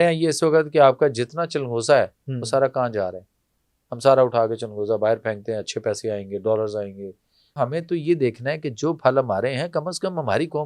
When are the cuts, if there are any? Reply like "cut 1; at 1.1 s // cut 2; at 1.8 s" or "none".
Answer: cut 1; at 7.6 s